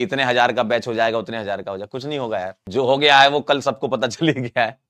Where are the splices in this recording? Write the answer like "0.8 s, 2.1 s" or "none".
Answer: 2.6 s